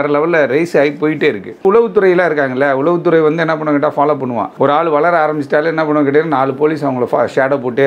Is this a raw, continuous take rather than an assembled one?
no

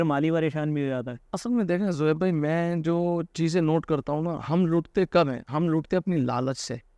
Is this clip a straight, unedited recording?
yes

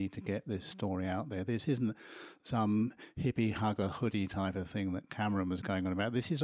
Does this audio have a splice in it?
yes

